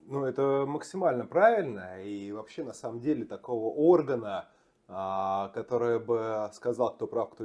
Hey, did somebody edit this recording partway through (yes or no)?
no